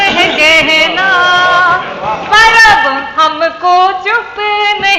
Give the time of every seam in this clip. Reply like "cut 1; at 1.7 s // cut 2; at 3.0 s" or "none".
none